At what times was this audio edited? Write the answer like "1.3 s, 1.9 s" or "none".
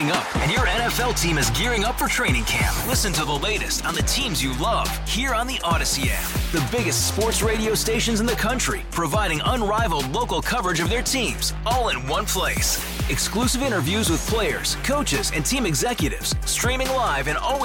none